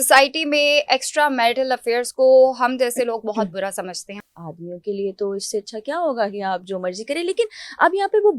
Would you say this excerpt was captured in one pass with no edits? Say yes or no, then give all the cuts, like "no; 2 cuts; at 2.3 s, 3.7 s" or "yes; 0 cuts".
no; 1 cut; at 4.3 s